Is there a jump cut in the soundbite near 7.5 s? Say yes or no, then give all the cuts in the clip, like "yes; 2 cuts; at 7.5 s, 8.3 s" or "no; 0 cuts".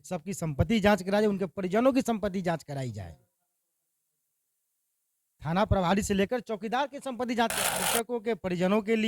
yes; 1 cut; at 7.5 s